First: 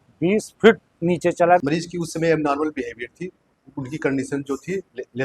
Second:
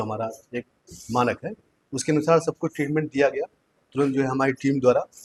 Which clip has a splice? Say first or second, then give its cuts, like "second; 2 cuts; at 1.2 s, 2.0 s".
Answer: first; 1 cut; at 1.6 s